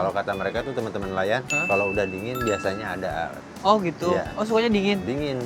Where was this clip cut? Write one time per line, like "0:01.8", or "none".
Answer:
none